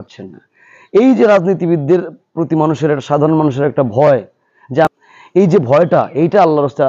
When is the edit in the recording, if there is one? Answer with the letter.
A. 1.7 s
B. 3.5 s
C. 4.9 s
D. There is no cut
C